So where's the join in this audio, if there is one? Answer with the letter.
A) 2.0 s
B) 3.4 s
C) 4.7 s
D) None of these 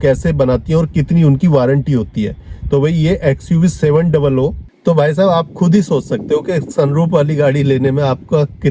C